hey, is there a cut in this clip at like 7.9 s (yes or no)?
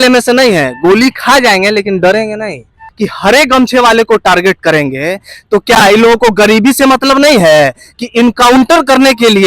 no